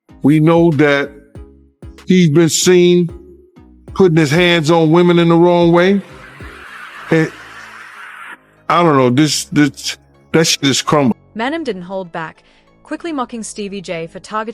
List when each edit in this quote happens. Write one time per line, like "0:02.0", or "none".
0:11.1